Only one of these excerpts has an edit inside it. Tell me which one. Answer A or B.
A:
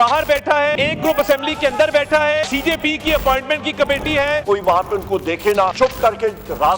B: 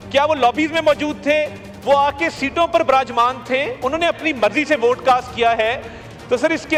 A